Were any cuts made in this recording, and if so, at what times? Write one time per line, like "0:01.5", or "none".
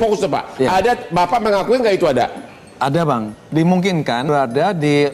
0:03.3
0:04.3